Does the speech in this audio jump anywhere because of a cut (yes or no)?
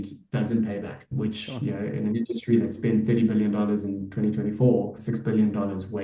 yes